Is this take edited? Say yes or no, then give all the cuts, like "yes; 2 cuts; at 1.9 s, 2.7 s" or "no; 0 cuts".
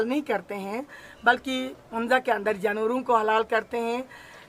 no; 0 cuts